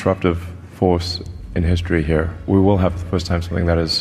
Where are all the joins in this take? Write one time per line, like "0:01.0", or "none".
0:02.4